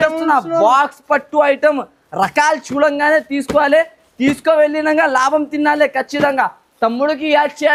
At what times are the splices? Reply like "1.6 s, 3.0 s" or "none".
none

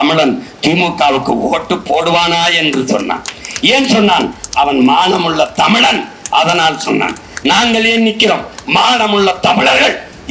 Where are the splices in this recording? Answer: none

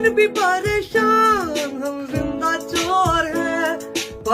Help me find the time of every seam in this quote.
none

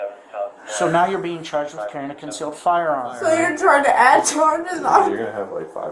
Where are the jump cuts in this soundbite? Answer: 3.2 s

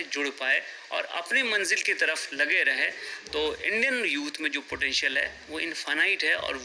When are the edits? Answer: none

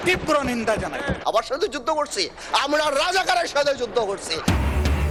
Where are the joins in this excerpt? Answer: none

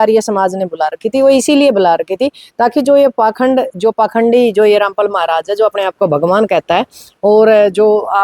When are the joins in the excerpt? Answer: none

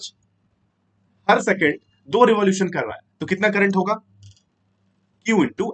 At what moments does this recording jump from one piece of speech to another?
none

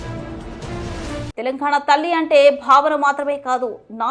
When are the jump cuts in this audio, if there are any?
1.3 s

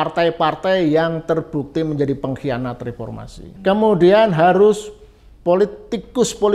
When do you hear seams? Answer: 3.6 s

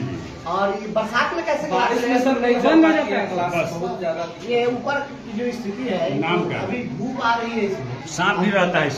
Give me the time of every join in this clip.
8.0 s

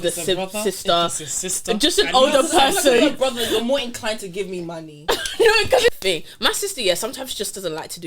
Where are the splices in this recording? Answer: 5.9 s

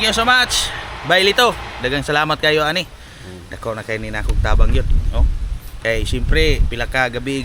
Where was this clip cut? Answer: none

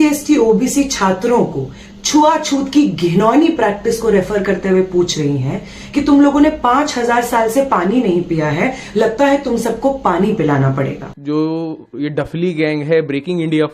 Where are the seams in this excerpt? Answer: 11.1 s

